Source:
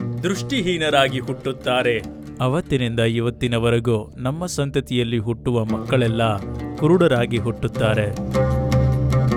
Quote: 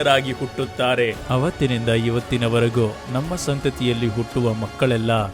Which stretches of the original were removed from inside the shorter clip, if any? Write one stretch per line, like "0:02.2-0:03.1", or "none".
0:02.1-0:02.3

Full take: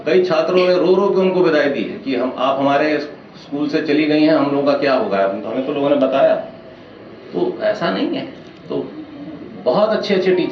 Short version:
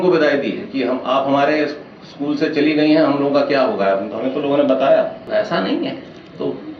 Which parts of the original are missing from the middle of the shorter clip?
0:06.6-0:07.6

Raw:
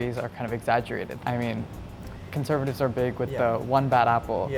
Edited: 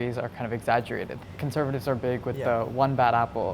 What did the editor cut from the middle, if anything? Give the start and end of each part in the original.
0:01.1-0:02.1

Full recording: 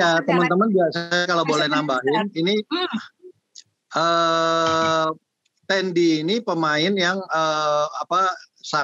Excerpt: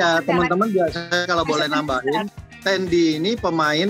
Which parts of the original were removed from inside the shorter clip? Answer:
0:02.3-0:05.3

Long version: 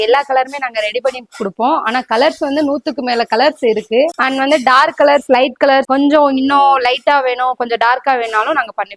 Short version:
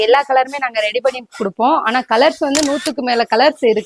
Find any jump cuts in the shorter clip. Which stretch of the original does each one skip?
none

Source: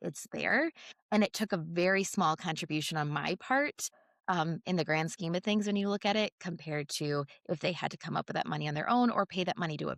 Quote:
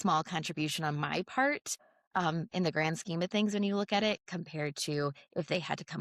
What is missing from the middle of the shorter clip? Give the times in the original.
none

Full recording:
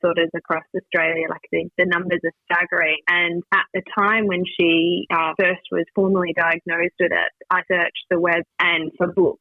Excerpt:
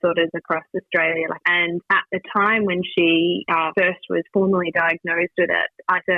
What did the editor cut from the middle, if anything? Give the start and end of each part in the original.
0:01.4-0:03.0

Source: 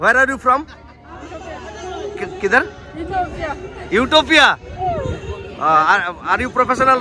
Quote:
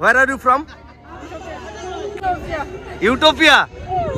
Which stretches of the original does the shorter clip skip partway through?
0:02.2-0:03.1

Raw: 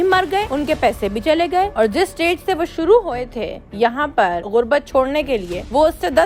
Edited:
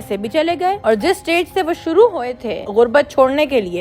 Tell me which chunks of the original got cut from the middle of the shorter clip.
0:03.6-0:04.4

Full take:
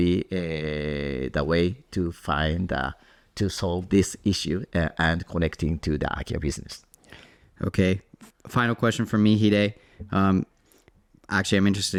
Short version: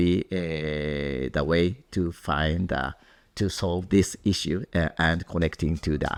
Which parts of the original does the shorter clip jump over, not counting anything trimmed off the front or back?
none

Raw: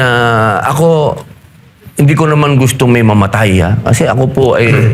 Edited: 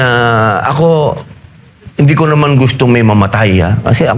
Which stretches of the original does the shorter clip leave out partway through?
none

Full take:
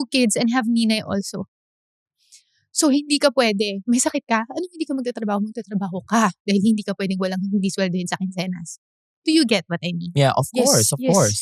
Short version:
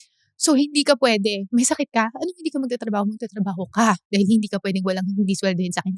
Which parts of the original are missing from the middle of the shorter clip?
none

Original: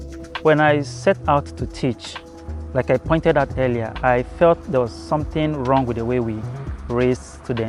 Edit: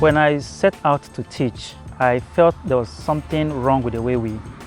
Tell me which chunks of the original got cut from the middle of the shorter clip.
0:02.3-0:03.9

